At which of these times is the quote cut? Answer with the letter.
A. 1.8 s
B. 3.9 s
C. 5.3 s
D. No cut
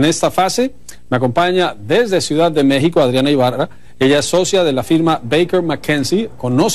D